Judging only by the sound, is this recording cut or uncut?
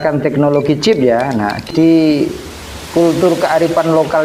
cut